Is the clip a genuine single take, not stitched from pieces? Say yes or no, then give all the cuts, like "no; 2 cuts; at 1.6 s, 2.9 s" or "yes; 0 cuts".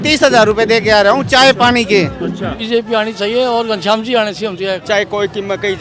no; 2 cuts; at 2.6 s, 4.8 s